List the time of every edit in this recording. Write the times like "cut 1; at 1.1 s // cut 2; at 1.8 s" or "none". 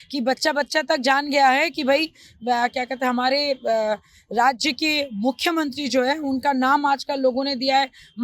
none